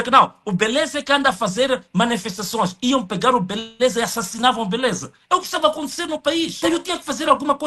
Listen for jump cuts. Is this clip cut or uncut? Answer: cut